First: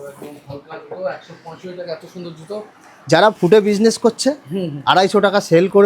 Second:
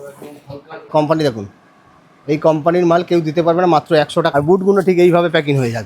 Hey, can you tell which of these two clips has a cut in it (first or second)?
second